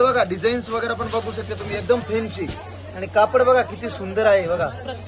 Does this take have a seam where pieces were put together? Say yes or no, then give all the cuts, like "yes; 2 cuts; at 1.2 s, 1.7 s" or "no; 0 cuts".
no; 0 cuts